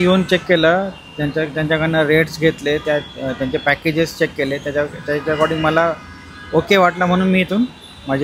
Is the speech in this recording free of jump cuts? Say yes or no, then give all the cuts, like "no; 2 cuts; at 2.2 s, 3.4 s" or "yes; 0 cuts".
yes; 0 cuts